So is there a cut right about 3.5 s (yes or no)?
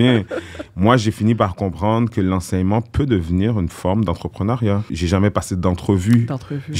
no